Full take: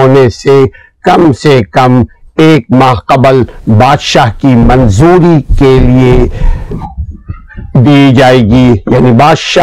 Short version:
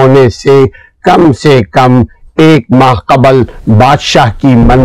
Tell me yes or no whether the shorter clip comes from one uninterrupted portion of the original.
yes